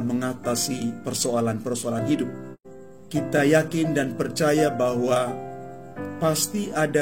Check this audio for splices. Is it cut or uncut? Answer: cut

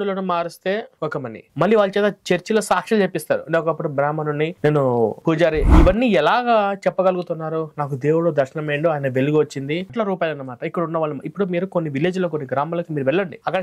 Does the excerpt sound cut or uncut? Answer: cut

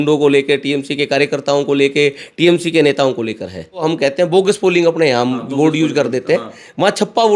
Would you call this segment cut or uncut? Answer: cut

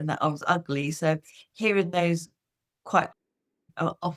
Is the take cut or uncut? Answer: uncut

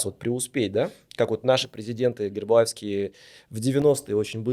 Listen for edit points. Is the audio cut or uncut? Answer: uncut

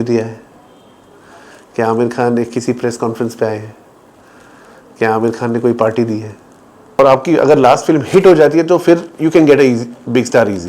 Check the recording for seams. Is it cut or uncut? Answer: cut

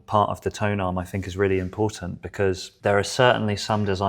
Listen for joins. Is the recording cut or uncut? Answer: cut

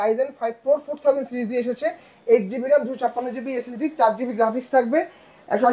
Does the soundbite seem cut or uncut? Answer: uncut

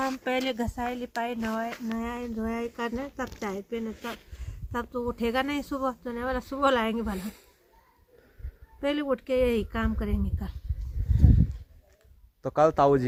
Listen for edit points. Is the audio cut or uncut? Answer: uncut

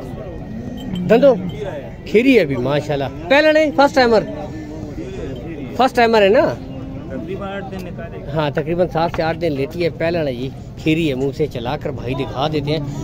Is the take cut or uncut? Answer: uncut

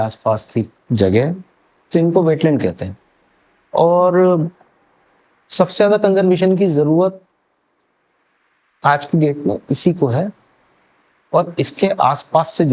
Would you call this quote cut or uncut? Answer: uncut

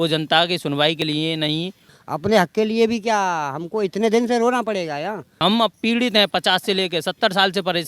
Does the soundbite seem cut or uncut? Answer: cut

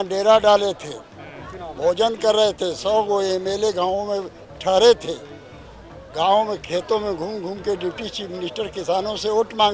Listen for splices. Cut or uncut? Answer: uncut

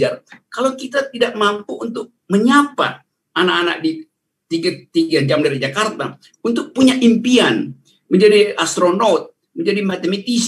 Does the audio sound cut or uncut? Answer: uncut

